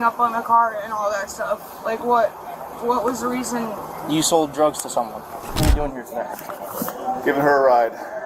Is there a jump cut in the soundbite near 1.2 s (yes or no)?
no